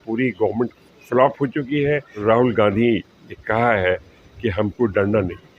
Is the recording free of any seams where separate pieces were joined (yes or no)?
no